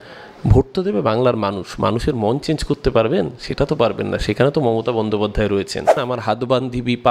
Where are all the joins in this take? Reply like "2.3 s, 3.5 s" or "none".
6.1 s